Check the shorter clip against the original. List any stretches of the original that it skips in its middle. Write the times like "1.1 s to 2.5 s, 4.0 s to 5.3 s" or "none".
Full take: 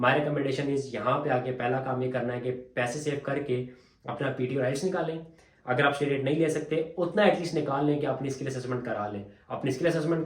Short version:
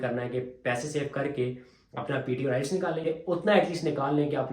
5.2 s to 6.7 s